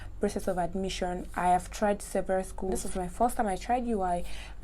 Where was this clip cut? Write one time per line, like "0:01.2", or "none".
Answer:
0:02.8